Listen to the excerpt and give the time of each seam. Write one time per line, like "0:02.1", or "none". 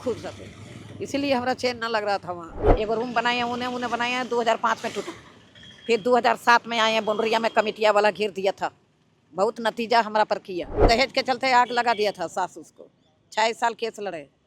0:02.6
0:10.8